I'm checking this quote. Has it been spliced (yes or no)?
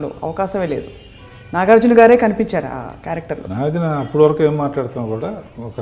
yes